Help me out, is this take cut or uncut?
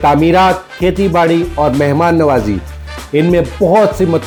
uncut